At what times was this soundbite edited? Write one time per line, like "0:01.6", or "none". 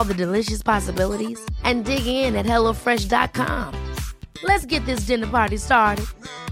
none